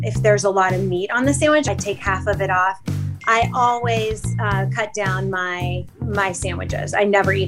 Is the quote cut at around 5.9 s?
yes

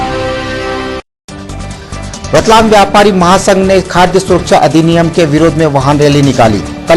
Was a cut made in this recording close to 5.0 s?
no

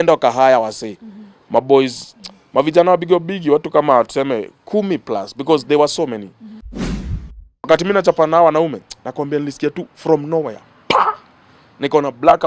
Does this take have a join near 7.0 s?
yes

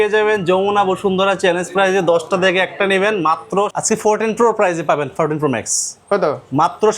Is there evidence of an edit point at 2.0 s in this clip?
no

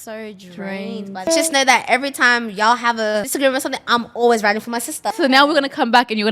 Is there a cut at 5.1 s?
yes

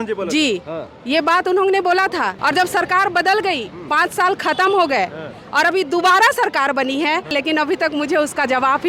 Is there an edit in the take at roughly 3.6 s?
no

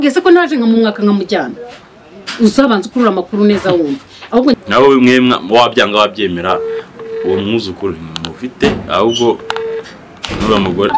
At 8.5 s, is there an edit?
no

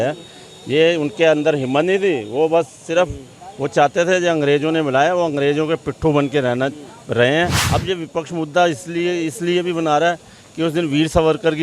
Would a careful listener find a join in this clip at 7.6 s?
yes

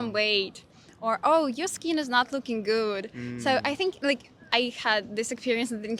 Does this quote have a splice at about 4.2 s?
no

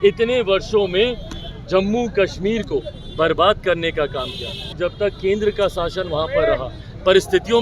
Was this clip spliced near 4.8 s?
yes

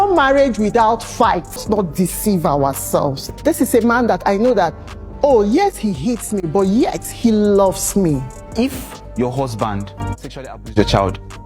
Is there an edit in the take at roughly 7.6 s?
no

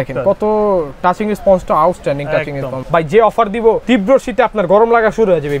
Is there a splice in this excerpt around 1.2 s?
no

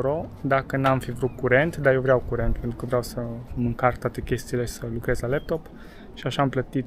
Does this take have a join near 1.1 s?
no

